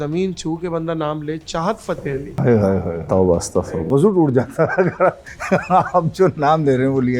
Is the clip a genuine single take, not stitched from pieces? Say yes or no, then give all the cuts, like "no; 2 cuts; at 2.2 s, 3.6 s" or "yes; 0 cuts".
no; 2 cuts; at 2.3 s, 3.9 s